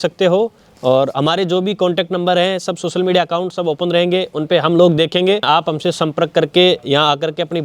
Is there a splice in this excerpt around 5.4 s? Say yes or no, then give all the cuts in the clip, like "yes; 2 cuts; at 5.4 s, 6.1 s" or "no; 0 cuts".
yes; 1 cut; at 5.4 s